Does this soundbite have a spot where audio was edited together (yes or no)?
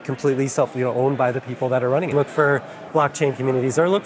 yes